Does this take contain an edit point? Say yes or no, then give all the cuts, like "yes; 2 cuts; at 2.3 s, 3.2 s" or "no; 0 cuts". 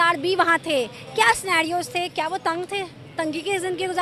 no; 0 cuts